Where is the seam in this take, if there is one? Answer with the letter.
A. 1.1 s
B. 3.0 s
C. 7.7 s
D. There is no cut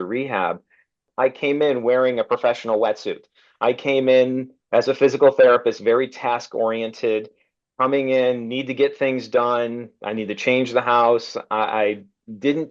A